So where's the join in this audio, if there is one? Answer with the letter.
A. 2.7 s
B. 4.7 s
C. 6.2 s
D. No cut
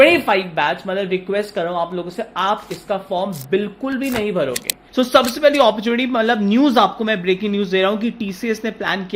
B